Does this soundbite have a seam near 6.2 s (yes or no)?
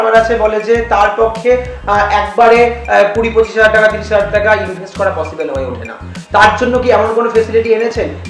no